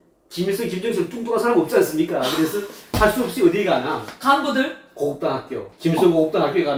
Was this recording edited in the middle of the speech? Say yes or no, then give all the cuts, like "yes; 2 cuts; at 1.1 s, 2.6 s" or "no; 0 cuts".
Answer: no; 0 cuts